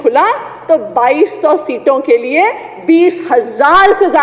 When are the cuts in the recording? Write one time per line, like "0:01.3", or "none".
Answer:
none